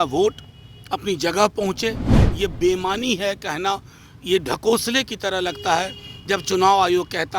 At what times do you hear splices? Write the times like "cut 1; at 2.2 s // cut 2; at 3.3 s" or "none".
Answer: cut 1; at 2.2 s